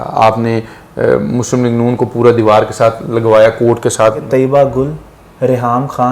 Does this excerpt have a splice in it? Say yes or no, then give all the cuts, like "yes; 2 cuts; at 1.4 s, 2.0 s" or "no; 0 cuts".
yes; 1 cut; at 4.2 s